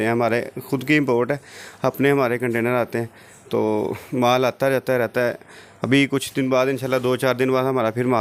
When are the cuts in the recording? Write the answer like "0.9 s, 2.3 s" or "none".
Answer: none